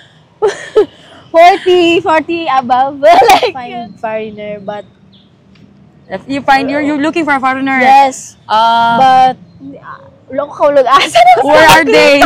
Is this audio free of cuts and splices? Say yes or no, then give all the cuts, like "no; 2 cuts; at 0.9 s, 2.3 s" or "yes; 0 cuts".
no; 1 cut; at 3.6 s